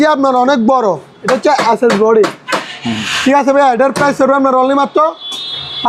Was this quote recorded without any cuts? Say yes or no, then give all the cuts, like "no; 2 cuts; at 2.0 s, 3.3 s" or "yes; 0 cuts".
yes; 0 cuts